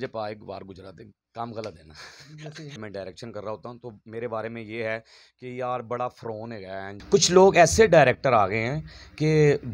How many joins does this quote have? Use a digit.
2